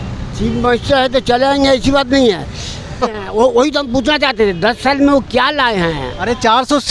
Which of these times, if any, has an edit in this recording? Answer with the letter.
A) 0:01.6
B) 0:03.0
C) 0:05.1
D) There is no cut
B